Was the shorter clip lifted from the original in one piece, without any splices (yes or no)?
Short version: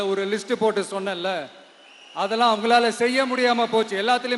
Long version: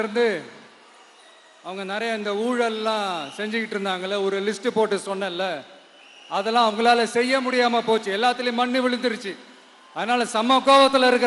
yes